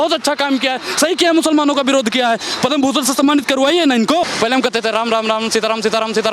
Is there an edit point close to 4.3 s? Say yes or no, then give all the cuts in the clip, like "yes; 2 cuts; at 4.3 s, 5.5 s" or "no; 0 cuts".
yes; 1 cut; at 4.3 s